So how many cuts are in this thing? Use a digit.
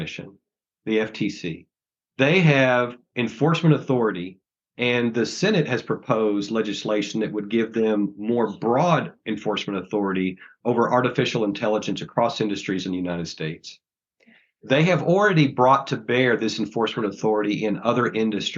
1